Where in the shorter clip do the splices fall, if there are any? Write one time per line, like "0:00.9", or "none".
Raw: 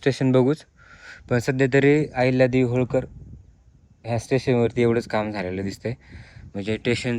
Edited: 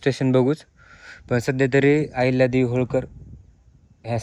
none